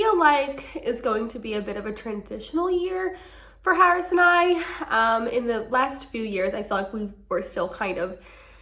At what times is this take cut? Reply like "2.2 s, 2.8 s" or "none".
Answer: none